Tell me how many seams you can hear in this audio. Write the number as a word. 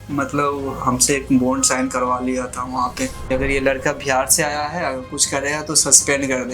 one